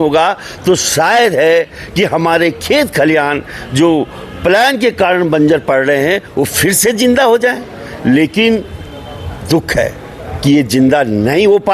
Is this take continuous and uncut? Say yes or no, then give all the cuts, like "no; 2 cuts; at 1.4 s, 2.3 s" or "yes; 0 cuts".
yes; 0 cuts